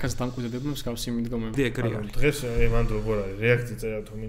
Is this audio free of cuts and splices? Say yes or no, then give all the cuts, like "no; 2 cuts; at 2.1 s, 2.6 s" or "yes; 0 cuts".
no; 1 cut; at 1.5 s